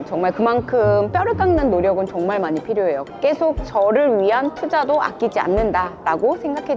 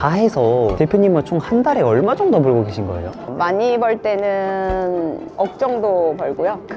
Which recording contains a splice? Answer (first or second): first